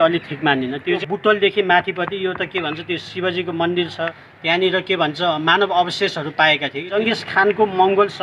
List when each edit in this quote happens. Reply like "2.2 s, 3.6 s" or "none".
1.0 s, 4.3 s, 6.9 s